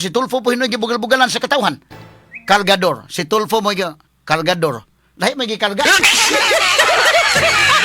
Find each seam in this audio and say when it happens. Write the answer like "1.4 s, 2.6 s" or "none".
2.0 s